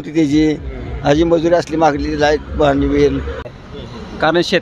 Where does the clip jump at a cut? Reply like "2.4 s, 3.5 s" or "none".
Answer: 3.5 s

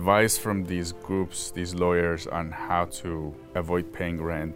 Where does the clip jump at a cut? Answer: 3.4 s

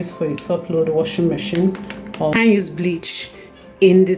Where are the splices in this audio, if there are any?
2.3 s

